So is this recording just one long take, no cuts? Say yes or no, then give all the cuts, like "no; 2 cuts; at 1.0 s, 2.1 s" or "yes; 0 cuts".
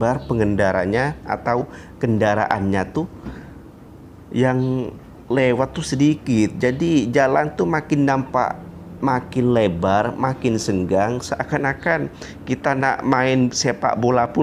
yes; 0 cuts